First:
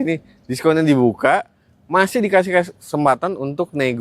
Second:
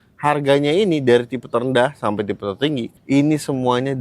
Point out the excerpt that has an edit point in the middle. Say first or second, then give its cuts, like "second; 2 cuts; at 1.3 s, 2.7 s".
second; 1 cut; at 2.9 s